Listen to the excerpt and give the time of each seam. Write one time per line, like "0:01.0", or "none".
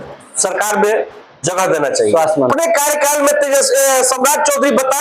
0:02.5

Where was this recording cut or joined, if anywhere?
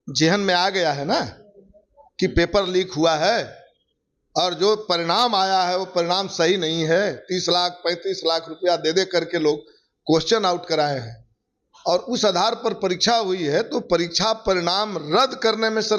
none

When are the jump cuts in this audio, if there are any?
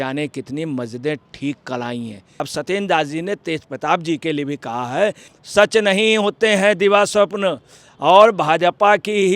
0:02.5
0:05.3

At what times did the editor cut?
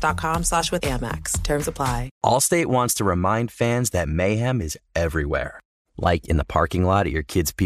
0:02.1

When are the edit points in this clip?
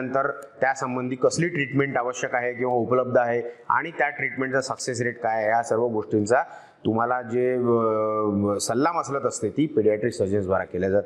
none

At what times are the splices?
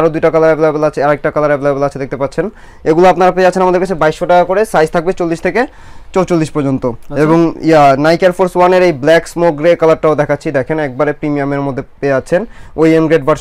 none

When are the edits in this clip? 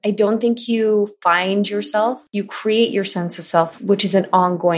0:02.2
0:03.7

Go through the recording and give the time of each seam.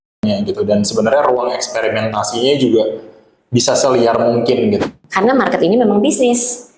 0:04.8

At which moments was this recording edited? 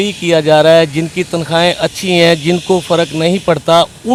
none

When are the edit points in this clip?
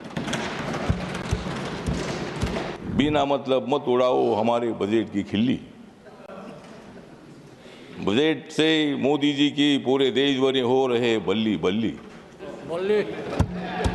0:02.8

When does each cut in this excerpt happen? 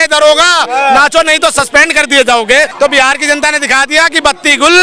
0:02.7

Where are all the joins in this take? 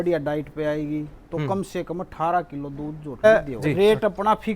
0:03.2

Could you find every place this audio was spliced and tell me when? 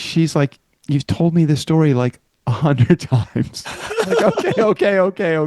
none

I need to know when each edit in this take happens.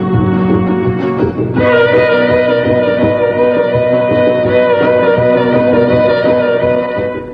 none

